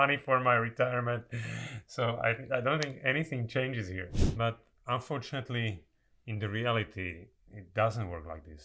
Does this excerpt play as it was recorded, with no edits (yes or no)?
no